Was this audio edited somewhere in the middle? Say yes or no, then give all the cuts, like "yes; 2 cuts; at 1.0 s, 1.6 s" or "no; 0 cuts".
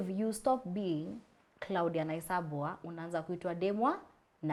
no; 0 cuts